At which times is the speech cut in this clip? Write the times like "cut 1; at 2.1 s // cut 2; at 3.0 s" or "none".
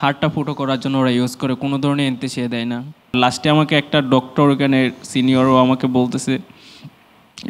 cut 1; at 3.1 s